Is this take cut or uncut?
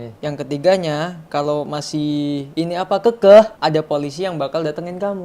cut